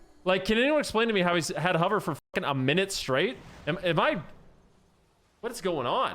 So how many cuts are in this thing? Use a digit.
1